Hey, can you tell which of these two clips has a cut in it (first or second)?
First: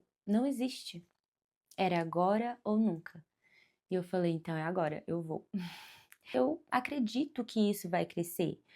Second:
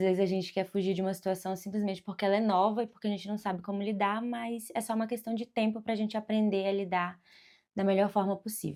first